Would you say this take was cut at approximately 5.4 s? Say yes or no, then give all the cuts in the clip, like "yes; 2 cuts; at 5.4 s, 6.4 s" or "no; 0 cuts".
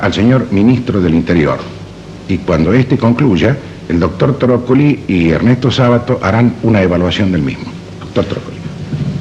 yes; 1 cut; at 5.4 s